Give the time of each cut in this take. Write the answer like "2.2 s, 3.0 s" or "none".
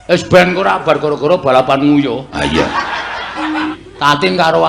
3.8 s